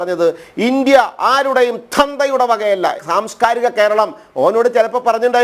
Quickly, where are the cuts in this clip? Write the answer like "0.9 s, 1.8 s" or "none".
3.0 s